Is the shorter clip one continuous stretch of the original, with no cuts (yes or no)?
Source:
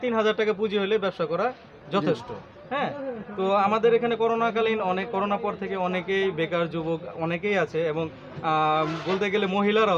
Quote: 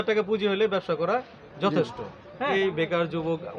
no